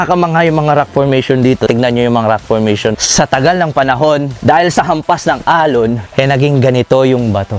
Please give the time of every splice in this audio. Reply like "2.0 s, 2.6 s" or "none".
1.7 s, 3.0 s, 4.3 s, 6.0 s